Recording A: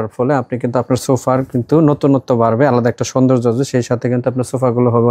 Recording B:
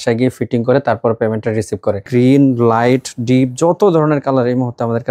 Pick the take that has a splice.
B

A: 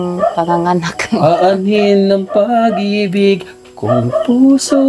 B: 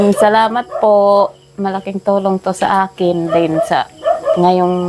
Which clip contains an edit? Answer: A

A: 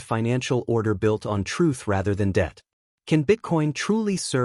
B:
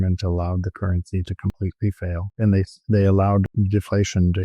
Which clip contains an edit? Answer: B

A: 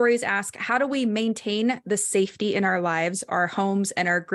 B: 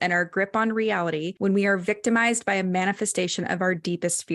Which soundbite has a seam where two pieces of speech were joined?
B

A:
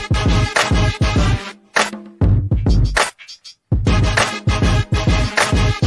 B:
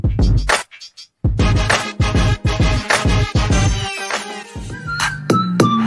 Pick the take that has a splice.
B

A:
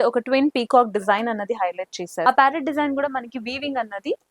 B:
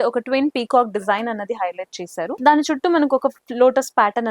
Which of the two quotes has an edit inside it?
A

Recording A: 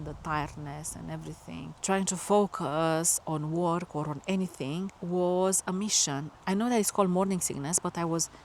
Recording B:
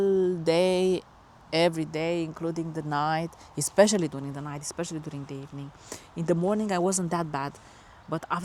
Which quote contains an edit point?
A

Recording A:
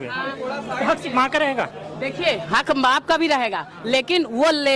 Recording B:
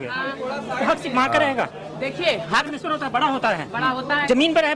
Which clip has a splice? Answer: B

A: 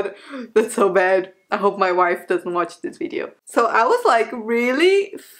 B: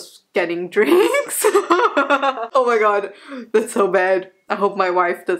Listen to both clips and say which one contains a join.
A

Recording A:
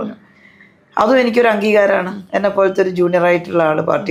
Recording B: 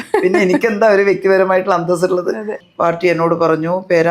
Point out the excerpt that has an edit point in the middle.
B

